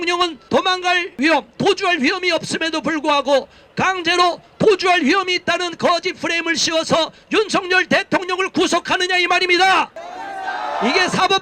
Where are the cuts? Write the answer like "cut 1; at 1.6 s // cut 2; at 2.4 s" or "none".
cut 1; at 1.1 s